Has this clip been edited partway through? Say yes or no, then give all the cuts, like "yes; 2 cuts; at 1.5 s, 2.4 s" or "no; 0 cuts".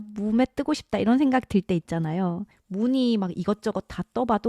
yes; 1 cut; at 2.5 s